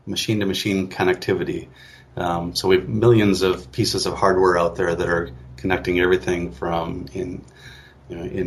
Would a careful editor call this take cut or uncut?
uncut